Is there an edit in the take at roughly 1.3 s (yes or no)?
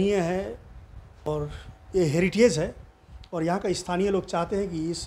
yes